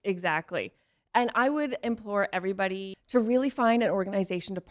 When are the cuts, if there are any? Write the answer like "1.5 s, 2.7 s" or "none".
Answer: 2.9 s